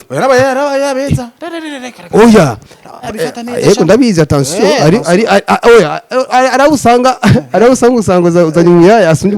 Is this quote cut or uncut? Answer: uncut